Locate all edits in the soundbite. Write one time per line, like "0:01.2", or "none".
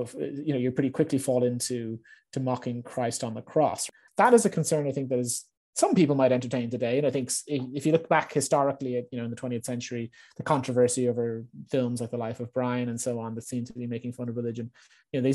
0:03.8